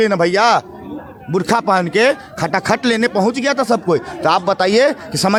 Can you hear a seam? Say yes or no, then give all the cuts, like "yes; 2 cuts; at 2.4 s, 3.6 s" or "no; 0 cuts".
no; 0 cuts